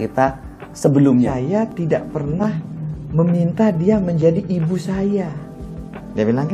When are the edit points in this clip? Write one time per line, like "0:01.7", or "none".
0:01.3